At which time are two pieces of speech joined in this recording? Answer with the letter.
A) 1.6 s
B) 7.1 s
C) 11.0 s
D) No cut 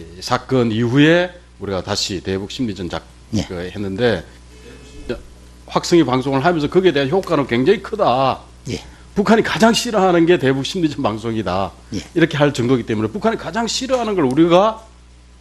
C